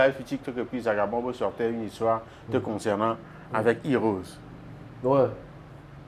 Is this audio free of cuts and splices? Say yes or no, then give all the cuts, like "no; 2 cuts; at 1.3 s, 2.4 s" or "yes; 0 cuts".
yes; 0 cuts